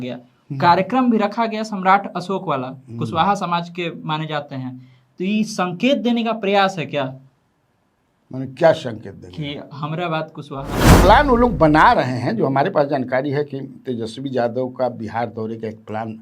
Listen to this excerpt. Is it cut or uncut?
cut